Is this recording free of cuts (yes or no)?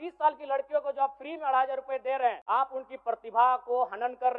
no